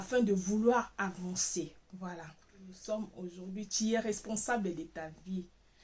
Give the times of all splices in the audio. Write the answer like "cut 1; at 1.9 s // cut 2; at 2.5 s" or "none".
cut 1; at 2.8 s